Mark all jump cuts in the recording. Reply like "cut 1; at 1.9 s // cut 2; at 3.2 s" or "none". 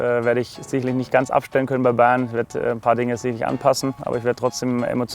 cut 1; at 4.0 s